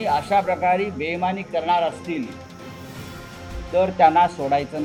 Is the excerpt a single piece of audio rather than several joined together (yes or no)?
yes